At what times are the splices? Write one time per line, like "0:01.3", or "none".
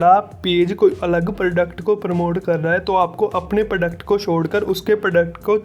none